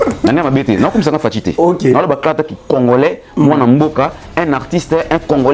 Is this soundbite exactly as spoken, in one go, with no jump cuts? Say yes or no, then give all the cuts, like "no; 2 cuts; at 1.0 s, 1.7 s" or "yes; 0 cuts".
yes; 0 cuts